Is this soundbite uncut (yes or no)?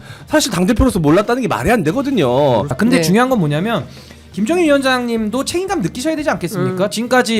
no